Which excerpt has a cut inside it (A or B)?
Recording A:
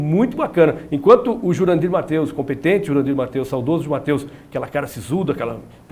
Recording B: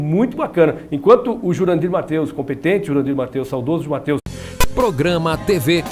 A